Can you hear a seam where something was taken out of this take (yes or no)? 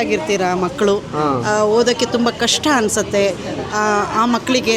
no